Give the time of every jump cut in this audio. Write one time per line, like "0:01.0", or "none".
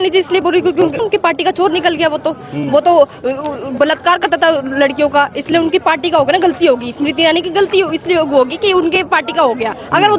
0:01.0